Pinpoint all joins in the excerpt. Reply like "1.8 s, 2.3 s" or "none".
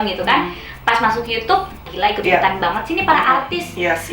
1.9 s